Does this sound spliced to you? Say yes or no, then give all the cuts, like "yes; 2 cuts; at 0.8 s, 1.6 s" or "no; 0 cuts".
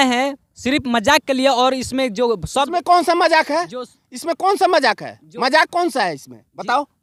no; 0 cuts